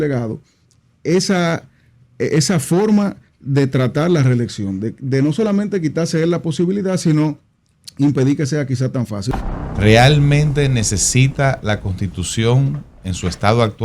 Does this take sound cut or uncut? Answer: cut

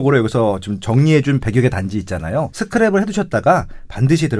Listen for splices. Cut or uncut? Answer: cut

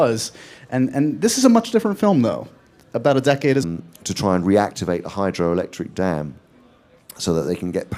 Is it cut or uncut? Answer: uncut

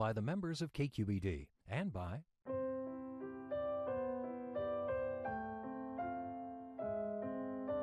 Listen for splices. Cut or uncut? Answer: cut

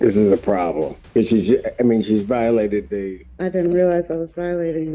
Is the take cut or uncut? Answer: cut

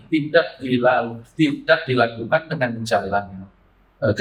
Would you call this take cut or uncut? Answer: uncut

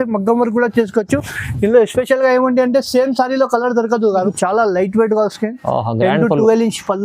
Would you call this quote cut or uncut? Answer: cut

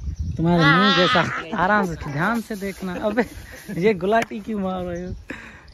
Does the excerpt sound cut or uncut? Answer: cut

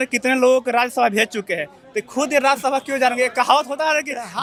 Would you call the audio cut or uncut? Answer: uncut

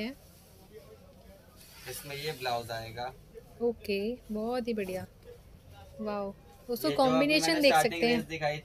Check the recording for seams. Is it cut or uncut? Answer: uncut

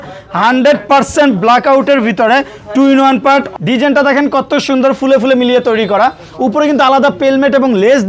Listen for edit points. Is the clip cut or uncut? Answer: cut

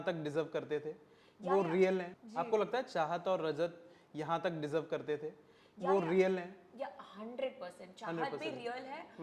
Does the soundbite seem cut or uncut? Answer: uncut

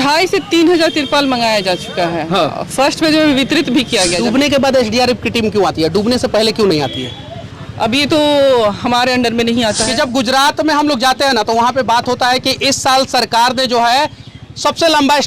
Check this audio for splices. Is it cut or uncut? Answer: cut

